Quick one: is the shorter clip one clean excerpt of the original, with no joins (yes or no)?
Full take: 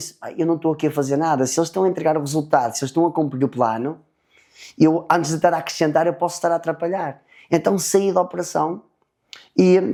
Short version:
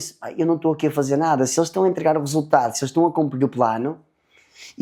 yes